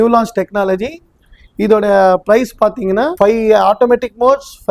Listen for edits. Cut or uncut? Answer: cut